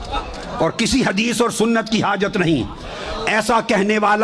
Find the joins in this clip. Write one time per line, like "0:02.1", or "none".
none